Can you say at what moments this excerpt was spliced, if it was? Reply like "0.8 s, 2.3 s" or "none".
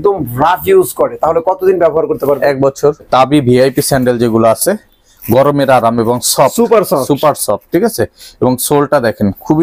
3.1 s